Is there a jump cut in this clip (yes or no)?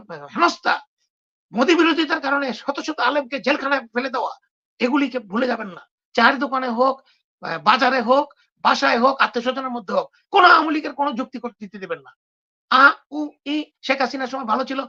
yes